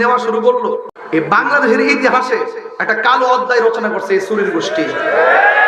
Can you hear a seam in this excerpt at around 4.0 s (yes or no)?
no